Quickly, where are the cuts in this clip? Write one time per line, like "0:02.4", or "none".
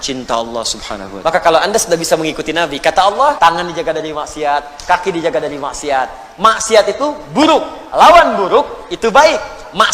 0:01.0
0:03.4